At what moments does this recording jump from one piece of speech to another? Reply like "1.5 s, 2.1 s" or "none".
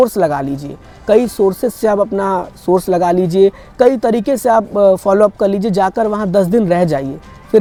none

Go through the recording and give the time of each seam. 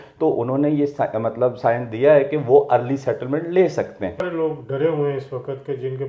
4.3 s

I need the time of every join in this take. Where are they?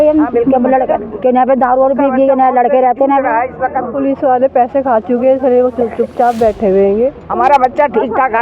3.9 s, 7.2 s

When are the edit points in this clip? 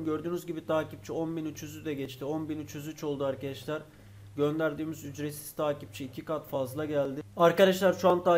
7.2 s

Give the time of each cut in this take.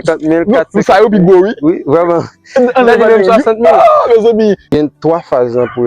4.8 s

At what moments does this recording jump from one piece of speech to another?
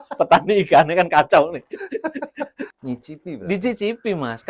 2.7 s

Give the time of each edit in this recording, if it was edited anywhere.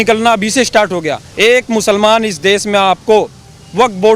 1.2 s

